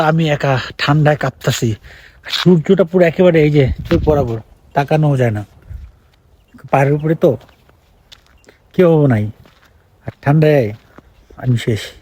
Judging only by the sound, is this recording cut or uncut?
uncut